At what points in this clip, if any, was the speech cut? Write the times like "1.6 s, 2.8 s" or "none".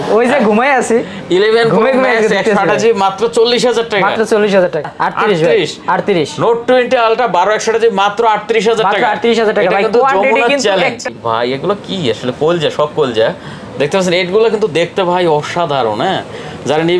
4.9 s, 11.1 s